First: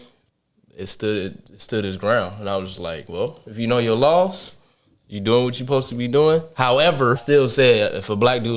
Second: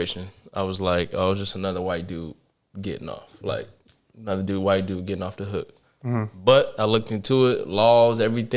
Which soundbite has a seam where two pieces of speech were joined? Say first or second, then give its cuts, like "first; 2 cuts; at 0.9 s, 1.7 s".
first; 1 cut; at 7.2 s